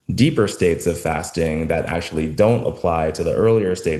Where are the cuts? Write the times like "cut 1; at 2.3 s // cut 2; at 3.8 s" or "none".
none